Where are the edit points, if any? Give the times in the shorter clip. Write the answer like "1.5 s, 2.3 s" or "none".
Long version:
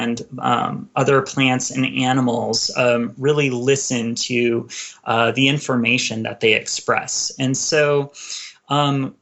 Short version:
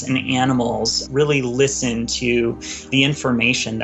1.0 s, 2.9 s

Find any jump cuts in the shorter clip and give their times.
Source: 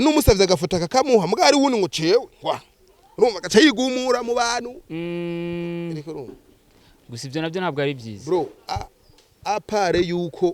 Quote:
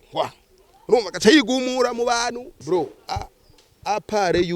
2.5 s

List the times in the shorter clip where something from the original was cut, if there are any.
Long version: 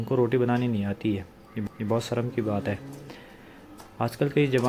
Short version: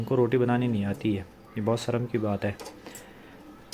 1.4 s

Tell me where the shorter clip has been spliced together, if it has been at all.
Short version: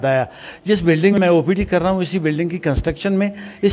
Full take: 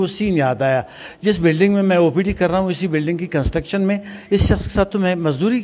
1.1 s

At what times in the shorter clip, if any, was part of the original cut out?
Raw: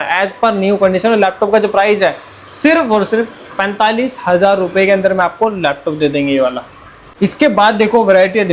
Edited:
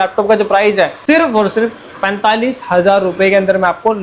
1.0 s

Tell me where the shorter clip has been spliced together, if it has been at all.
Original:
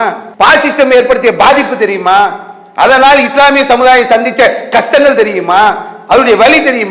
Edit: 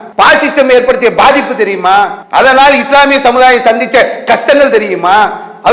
2.2 s

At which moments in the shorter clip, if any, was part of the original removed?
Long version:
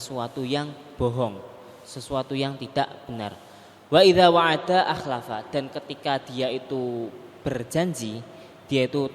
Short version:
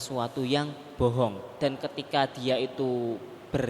1.5 s

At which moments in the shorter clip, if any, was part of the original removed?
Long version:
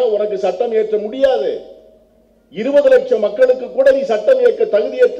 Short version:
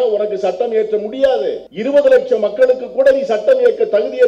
1.7 s

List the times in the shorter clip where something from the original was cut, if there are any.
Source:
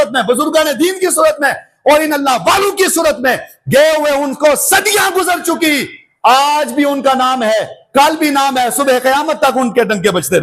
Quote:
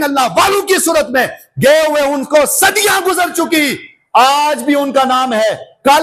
none

